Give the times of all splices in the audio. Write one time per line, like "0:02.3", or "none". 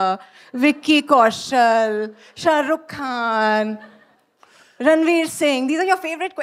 none